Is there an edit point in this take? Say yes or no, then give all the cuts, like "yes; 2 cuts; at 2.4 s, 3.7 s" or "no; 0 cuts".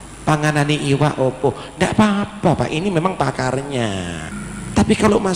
yes; 1 cut; at 4.3 s